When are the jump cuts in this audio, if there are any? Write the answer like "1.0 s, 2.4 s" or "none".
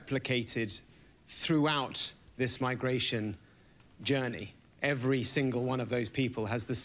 5.0 s

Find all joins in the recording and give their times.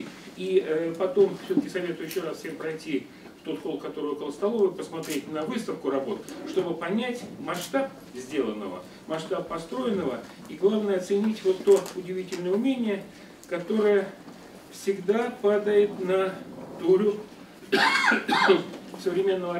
none

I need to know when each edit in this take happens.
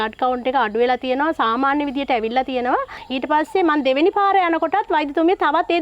3.0 s

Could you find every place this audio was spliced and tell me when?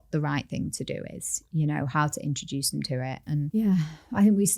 none

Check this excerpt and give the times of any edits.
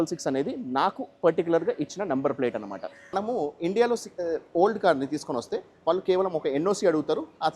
3.1 s

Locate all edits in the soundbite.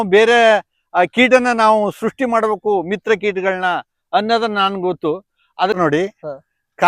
5.8 s

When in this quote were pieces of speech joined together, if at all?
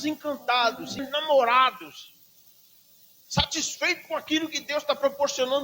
1.0 s

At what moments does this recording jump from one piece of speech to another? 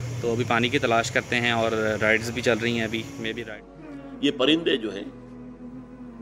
3.3 s

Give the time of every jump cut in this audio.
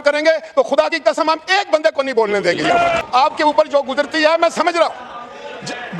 3.0 s

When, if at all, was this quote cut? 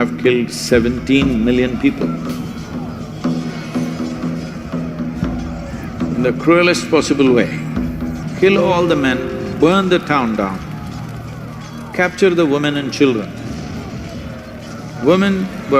8.2 s

